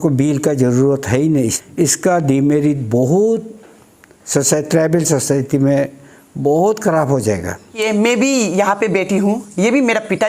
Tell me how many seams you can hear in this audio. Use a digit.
2